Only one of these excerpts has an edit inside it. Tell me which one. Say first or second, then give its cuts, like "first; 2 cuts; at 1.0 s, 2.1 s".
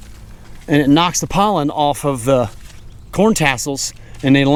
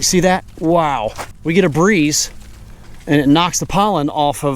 second; 1 cut; at 1.4 s